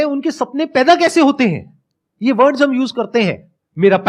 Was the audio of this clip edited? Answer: no; 0 cuts

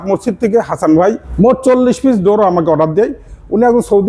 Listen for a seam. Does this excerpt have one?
yes; 1 cut; at 1.3 s

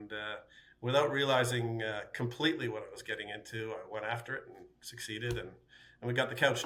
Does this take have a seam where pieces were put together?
no; 0 cuts

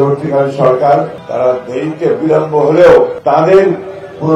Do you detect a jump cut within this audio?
yes; 2 cuts; at 1.2 s, 3.2 s

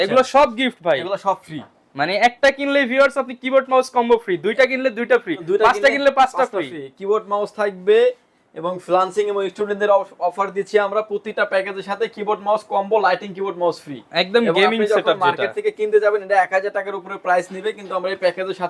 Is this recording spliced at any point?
no; 0 cuts

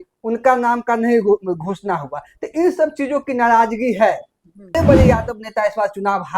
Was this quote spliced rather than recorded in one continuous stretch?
yes; 1 cut; at 4.8 s

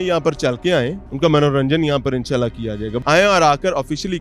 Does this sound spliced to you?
yes; 2 cuts; at 1.0 s, 2.9 s

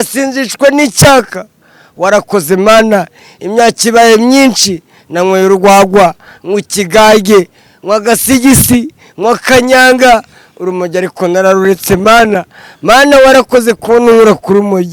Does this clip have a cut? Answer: no; 0 cuts

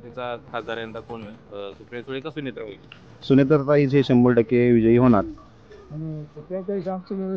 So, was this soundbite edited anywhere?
yes; 1 cut; at 5.3 s

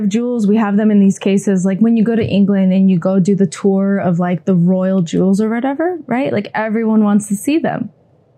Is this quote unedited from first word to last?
yes; 0 cuts

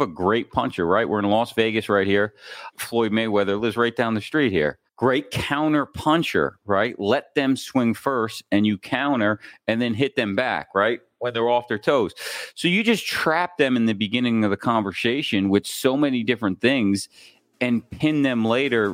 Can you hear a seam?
yes; 2 cuts; at 2.7 s, 4.8 s

